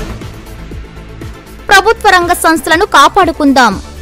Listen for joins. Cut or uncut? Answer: uncut